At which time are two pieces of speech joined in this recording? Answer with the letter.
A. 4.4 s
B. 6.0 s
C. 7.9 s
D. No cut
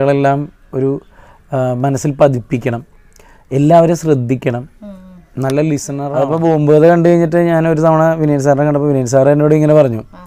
B